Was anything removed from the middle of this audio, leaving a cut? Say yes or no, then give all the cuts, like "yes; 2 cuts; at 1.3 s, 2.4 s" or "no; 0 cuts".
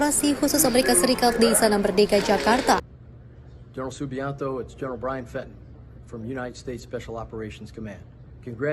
yes; 1 cut; at 2.9 s